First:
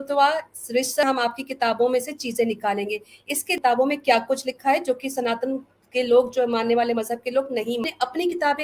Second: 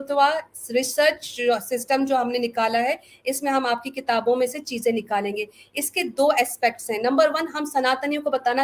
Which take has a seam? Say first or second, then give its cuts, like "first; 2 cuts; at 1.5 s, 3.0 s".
first; 3 cuts; at 1.0 s, 3.5 s, 7.8 s